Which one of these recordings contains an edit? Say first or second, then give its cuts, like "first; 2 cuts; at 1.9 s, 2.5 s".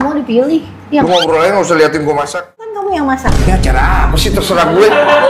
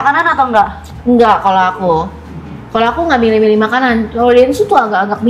first; 1 cut; at 2.7 s